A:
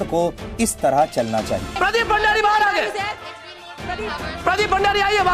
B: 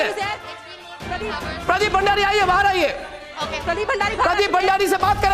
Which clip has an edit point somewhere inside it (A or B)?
A